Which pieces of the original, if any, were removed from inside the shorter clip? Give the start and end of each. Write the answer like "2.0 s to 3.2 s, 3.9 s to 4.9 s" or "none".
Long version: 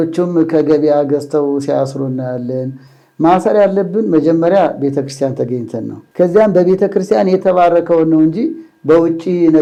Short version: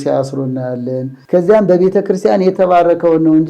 2.8 s to 6.0 s